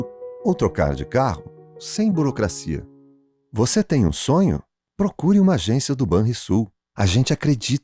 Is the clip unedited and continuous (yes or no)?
yes